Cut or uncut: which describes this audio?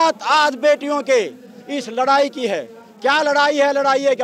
uncut